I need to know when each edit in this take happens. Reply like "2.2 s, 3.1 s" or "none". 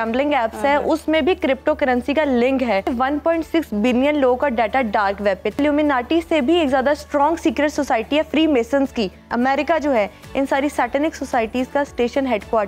2.9 s, 5.6 s, 9.2 s